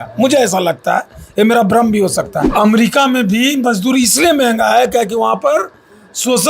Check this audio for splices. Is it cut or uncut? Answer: cut